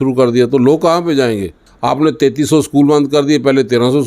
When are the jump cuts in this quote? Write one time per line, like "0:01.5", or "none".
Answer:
0:01.7